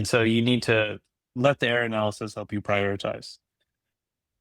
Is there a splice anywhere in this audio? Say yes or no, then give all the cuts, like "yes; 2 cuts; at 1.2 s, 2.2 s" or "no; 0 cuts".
yes; 1 cut; at 1.2 s